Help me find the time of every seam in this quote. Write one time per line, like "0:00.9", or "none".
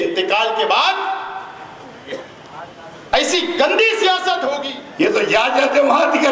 0:05.0